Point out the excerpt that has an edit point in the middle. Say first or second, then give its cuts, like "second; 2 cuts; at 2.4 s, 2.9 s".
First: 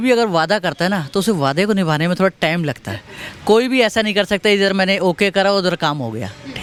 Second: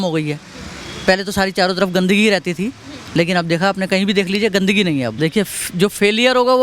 second; 1 cut; at 5.1 s